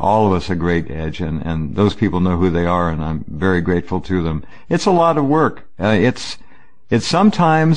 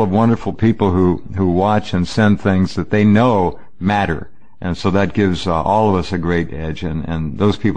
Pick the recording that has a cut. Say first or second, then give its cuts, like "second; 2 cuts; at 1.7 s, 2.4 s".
second; 1 cut; at 4.0 s